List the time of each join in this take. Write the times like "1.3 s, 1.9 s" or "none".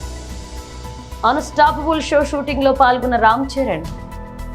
0.9 s